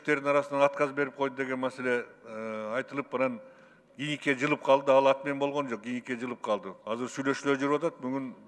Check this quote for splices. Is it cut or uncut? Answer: uncut